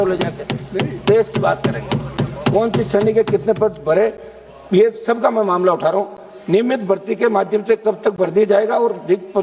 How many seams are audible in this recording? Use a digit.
0